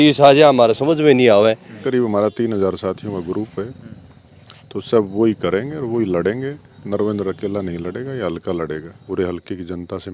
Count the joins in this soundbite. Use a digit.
2